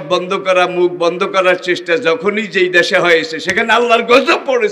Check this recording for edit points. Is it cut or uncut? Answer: uncut